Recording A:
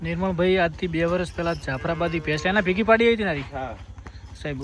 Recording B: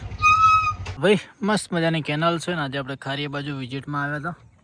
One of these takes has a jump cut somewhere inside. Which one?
B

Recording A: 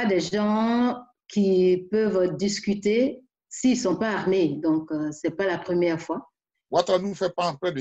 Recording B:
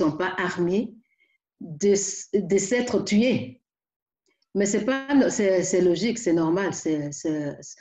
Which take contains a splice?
A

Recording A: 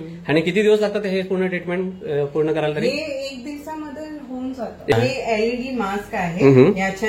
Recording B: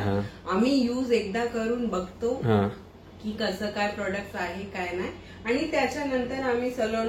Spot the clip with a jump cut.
A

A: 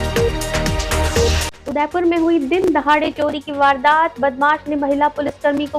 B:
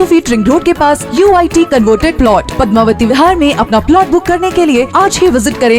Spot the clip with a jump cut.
A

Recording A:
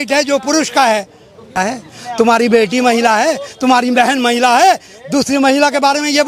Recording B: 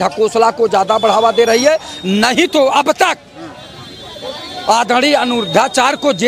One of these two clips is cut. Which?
A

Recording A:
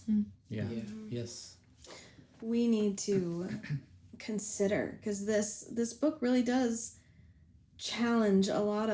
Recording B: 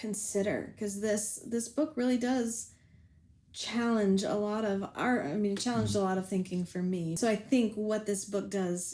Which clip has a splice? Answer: B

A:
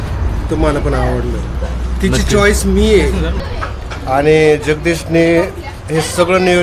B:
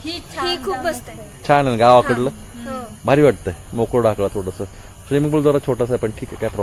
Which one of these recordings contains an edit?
A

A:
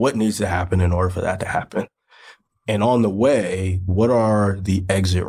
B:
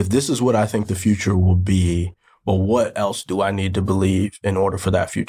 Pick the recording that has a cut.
A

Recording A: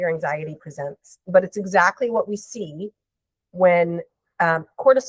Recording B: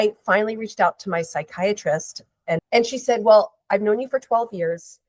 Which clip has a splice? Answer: B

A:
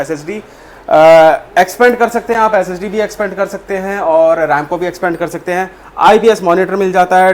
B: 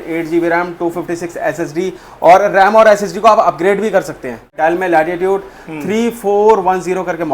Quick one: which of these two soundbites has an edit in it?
B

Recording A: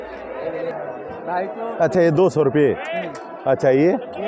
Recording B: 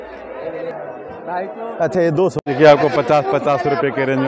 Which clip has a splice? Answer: B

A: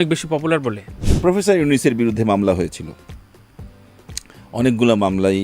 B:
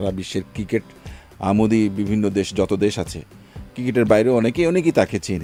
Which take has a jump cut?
A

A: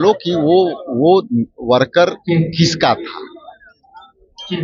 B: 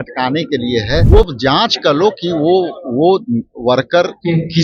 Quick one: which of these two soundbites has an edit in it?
B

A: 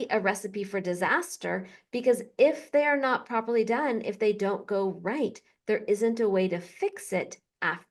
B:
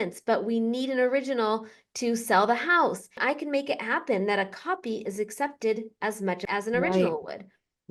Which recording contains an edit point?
B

